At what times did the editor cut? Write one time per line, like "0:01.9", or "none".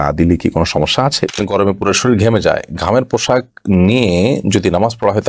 0:01.3

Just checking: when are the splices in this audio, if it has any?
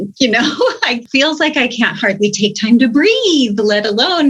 0:01.0

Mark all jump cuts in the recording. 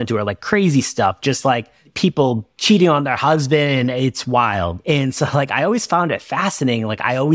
0:02.2

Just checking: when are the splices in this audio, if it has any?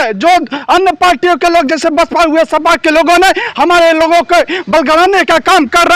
none

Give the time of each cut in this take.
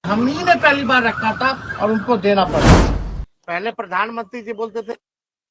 0:03.0

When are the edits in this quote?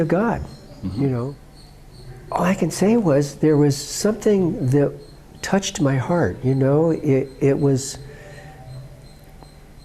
0:01.4

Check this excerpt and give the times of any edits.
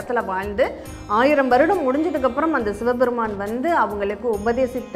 none

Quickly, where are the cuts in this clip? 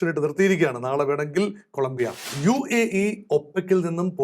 0:02.3

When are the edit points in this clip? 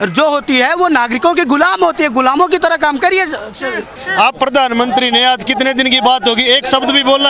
0:03.9

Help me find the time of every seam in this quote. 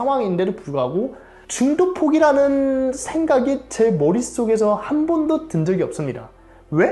none

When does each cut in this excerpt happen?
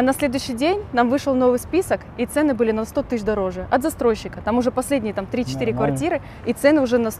none

